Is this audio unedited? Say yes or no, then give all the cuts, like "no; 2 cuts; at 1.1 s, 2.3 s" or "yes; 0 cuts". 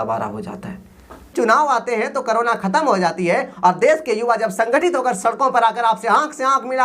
no; 1 cut; at 1.3 s